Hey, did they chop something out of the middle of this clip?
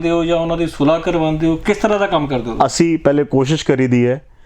no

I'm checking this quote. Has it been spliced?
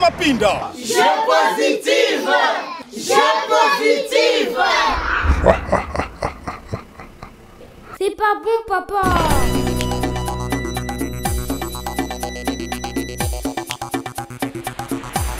no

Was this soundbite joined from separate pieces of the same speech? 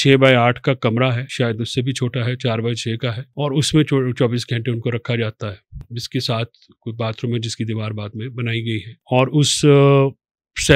yes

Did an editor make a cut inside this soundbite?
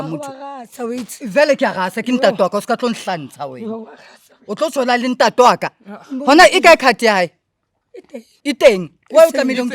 yes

